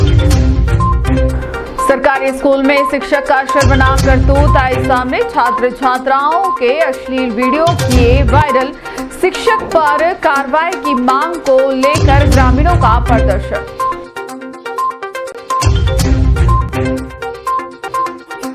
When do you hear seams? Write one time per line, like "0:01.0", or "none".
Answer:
0:01.1